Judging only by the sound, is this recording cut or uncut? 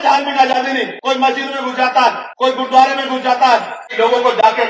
cut